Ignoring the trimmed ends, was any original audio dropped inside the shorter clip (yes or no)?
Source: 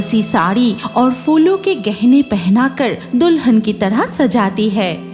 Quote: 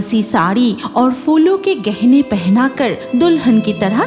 no